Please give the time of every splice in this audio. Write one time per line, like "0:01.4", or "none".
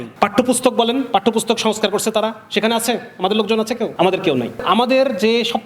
0:03.9
0:04.6